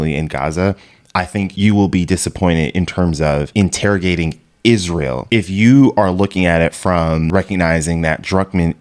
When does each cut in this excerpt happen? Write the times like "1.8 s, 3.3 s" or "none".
3.5 s, 5.2 s, 7.3 s